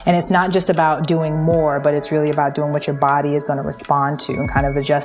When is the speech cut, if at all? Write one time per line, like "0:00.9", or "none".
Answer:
none